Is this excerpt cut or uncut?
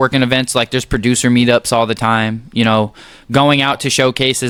uncut